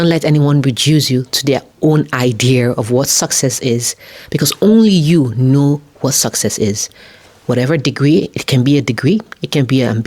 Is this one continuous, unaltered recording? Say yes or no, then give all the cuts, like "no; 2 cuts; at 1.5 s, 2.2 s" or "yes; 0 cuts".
yes; 0 cuts